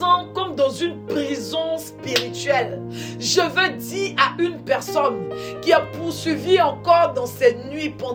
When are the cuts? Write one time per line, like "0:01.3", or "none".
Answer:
none